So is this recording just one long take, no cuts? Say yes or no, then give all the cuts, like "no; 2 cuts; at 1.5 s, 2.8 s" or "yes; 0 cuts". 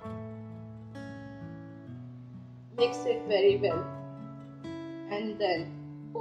no; 1 cut; at 2.7 s